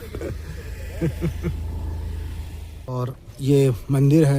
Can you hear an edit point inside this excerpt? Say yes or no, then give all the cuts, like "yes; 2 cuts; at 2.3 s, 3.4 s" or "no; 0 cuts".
yes; 1 cut; at 2.9 s